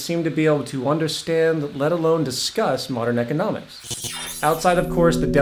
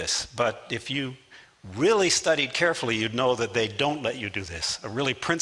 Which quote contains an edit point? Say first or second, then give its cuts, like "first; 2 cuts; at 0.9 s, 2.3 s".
first; 1 cut; at 1.0 s